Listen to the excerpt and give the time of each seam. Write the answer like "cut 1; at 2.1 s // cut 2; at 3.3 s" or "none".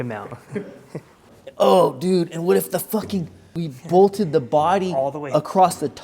cut 1; at 1.2 s // cut 2; at 3.6 s